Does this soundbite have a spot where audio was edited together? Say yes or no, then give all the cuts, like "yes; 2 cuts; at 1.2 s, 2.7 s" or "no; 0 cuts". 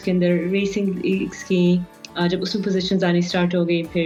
no; 0 cuts